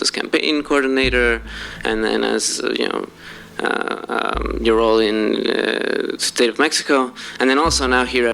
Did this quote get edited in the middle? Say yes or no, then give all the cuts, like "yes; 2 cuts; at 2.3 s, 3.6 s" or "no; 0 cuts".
no; 0 cuts